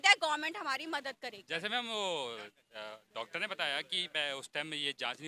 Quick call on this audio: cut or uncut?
uncut